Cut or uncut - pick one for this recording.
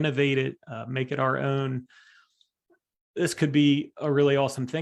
uncut